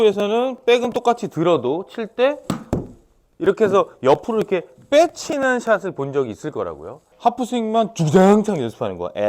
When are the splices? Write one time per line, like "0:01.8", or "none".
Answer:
0:07.1